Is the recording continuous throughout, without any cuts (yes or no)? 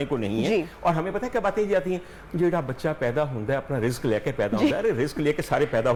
yes